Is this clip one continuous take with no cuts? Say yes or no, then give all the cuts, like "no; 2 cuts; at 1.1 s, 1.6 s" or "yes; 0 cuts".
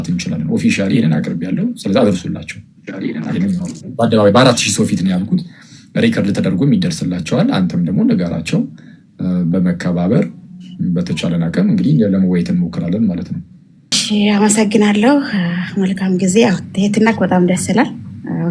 no; 1 cut; at 14.0 s